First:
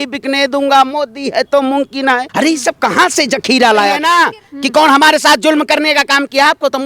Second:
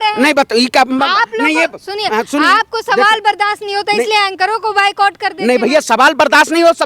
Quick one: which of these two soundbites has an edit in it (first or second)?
first